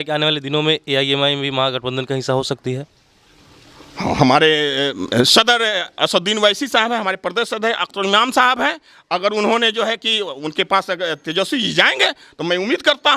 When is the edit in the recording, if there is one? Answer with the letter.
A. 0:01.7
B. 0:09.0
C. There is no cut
C